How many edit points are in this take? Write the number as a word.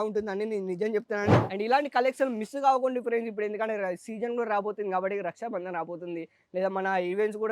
one